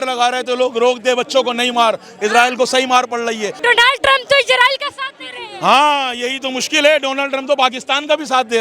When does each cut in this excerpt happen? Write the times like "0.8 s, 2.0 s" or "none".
3.5 s